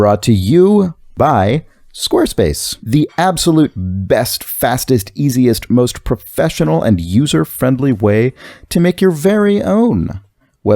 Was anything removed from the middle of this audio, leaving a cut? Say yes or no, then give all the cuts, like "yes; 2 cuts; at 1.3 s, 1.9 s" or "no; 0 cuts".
yes; 2 cuts; at 1.1 s, 2.7 s